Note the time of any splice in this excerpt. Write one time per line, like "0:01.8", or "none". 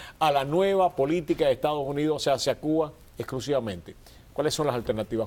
0:02.4